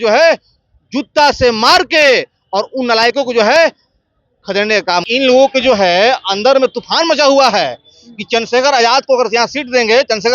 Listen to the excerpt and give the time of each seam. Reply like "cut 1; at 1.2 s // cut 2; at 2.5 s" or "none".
cut 1; at 5.1 s